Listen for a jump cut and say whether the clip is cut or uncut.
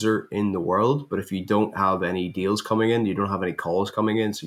uncut